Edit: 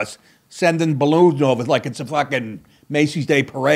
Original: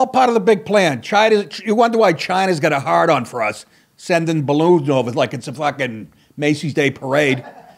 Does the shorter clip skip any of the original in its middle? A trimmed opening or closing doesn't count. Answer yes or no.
no